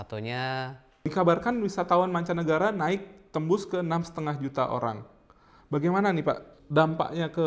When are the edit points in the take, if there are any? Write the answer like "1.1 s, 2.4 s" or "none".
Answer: 1.1 s, 6.5 s